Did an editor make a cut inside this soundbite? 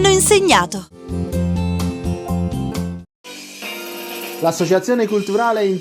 yes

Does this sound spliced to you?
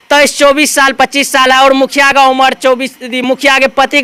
no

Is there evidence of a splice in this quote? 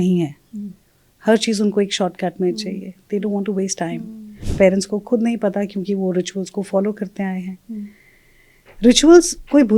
yes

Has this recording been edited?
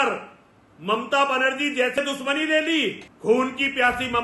yes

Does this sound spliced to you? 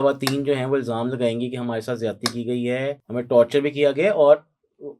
yes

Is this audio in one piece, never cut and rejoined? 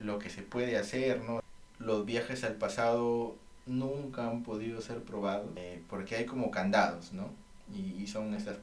no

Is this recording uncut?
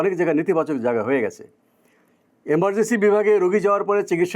yes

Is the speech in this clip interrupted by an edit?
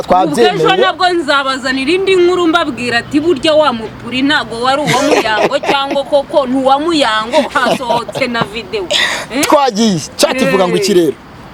no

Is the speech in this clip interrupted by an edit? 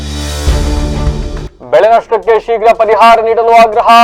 no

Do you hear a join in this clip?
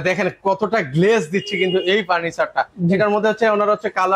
no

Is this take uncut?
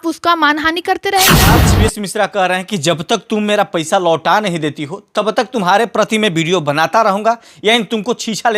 no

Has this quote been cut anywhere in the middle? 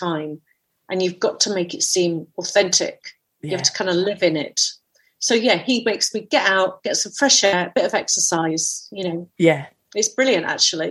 yes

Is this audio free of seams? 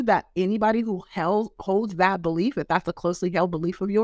yes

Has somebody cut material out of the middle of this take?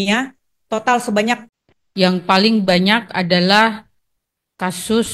yes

